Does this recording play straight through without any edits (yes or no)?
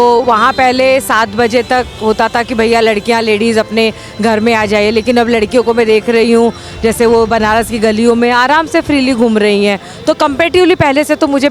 yes